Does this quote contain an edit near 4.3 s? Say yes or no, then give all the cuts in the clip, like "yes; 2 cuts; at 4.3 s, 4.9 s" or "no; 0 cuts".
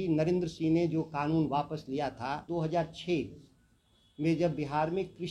no; 1 cut; at 2.4 s